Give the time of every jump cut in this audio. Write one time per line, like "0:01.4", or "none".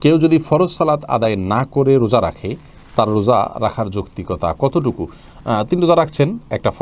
none